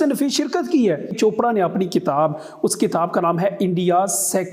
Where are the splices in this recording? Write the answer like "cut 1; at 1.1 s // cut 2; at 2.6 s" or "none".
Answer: cut 1; at 1.1 s